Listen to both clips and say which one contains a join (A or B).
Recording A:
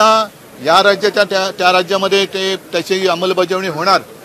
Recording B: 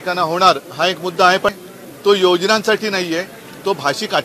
B